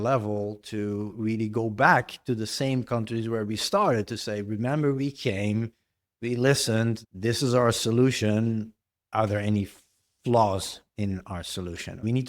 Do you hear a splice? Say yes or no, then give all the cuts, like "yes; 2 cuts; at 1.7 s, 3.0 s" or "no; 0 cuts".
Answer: yes; 1 cut; at 7.0 s